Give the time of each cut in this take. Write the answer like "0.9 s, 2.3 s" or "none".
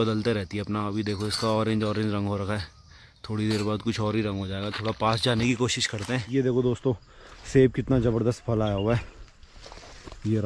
6.2 s